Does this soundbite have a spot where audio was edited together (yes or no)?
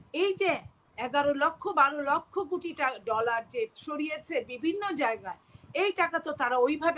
no